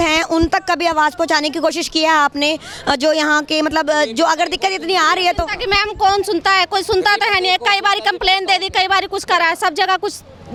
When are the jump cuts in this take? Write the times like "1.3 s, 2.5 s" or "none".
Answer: none